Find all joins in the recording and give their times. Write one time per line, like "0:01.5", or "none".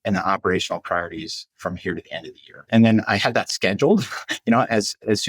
0:02.7